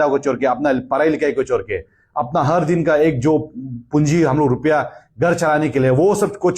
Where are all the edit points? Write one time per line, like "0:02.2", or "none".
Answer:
none